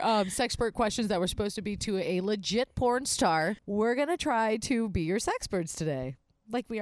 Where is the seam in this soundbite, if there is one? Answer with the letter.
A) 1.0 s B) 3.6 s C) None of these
B